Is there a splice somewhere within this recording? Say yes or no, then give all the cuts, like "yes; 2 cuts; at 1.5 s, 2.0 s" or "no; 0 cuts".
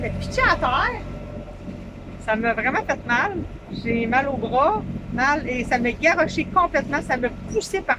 no; 0 cuts